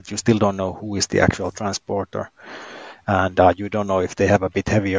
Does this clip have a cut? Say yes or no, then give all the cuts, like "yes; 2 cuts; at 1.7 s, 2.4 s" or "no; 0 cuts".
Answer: no; 0 cuts